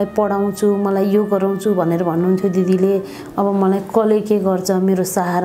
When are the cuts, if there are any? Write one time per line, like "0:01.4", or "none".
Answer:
none